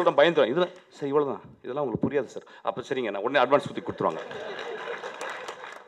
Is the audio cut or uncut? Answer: uncut